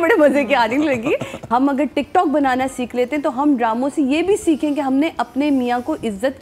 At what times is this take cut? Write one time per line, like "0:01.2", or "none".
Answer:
0:01.3